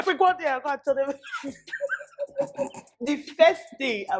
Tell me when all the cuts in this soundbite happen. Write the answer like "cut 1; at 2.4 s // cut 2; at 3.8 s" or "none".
cut 1; at 2.9 s